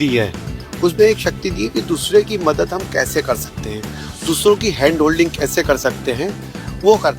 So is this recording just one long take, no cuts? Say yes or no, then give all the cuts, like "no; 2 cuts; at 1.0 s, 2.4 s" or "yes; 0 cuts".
yes; 0 cuts